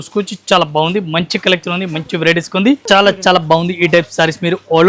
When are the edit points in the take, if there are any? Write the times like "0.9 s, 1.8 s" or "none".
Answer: 2.8 s